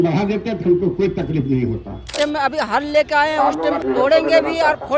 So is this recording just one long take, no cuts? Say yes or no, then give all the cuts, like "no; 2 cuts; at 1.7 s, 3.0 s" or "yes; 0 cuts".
no; 2 cuts; at 2.1 s, 3.8 s